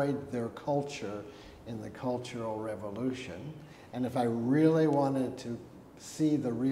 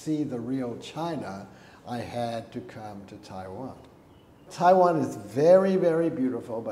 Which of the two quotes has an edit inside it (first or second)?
second